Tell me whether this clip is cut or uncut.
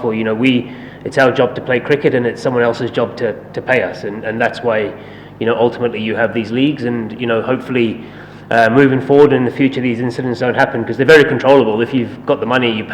uncut